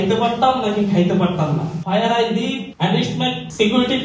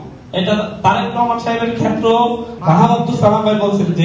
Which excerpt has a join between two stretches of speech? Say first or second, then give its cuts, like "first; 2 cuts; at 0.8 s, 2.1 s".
first; 2 cuts; at 1.8 s, 3.2 s